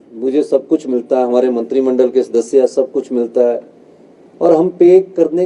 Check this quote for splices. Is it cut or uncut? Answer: uncut